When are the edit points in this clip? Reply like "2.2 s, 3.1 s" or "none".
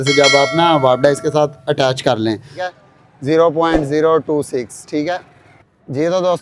2.7 s